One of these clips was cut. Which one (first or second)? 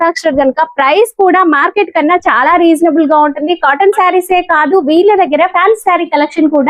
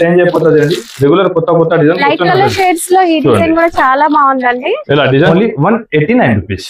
second